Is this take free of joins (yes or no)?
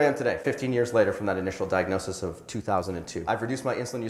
yes